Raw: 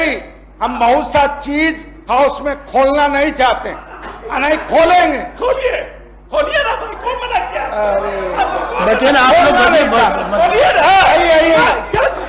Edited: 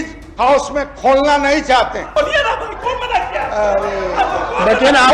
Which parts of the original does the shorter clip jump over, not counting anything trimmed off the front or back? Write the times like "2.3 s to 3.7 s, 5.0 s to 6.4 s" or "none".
3.7 s to 6.2 s